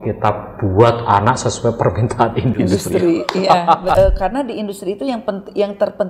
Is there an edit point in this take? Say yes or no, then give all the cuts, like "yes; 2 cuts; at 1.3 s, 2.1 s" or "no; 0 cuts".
yes; 1 cut; at 3.9 s